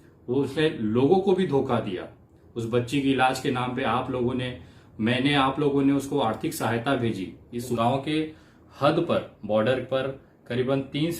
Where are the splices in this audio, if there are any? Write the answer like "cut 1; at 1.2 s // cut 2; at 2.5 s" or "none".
cut 1; at 7.7 s